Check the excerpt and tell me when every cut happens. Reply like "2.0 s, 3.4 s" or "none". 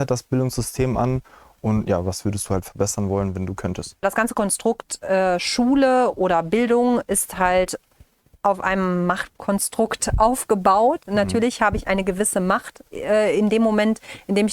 4.0 s, 11.0 s